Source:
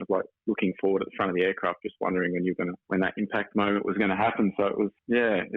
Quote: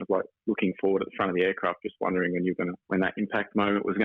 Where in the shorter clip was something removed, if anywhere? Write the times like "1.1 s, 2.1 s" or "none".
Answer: none